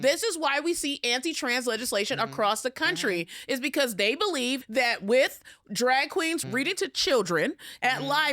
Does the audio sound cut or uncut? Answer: cut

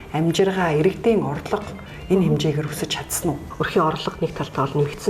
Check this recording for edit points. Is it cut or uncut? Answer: cut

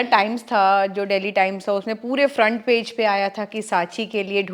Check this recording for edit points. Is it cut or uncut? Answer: uncut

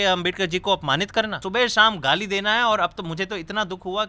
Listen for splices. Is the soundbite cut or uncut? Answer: cut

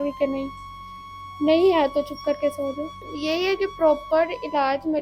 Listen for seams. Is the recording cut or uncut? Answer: cut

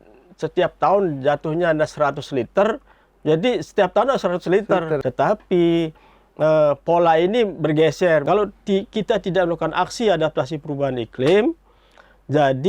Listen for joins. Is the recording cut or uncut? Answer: cut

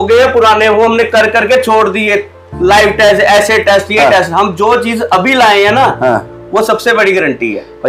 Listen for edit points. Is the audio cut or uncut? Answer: uncut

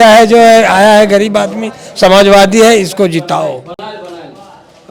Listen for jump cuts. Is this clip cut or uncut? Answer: uncut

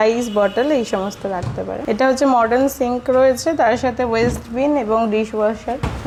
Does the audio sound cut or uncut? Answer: uncut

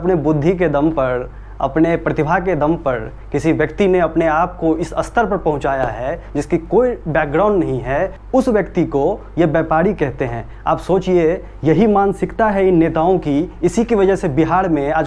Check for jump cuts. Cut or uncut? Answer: uncut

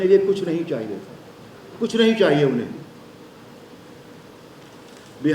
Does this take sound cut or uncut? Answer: cut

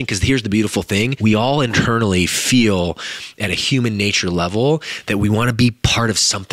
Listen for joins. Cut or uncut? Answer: cut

